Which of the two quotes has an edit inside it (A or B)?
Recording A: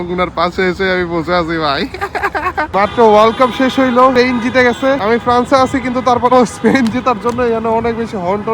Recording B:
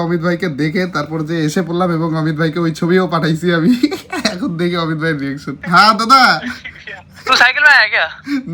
A